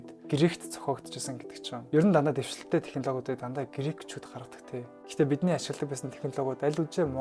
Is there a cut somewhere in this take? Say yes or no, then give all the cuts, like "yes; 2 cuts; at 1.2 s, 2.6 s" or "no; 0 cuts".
yes; 1 cut; at 5.0 s